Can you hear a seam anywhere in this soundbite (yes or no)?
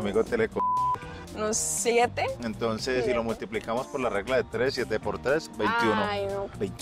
yes